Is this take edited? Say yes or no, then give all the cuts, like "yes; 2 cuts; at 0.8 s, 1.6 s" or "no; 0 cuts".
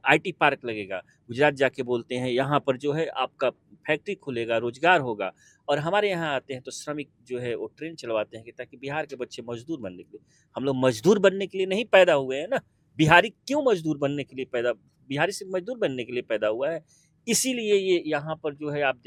no; 0 cuts